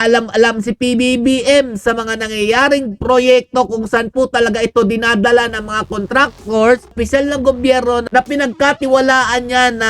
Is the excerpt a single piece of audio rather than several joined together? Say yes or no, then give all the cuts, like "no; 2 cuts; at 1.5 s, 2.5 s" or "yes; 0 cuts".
no; 1 cut; at 6.9 s